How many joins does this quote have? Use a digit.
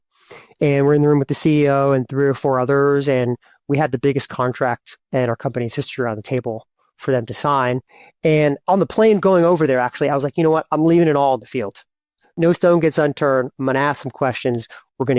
2